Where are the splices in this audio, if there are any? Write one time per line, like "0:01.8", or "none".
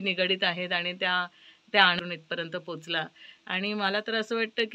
0:02.0